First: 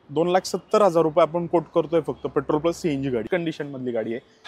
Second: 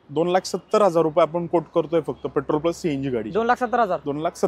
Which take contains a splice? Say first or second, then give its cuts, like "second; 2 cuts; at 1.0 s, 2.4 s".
first; 1 cut; at 3.2 s